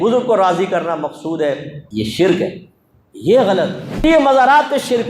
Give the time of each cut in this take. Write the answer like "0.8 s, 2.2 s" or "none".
1.8 s, 3.9 s